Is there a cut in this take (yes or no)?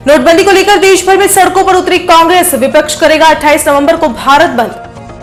no